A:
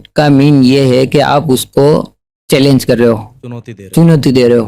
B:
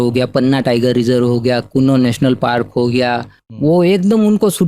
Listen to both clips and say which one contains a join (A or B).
B